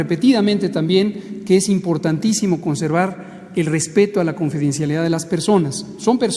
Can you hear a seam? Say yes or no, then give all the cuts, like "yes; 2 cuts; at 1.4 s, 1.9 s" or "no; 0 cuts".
no; 0 cuts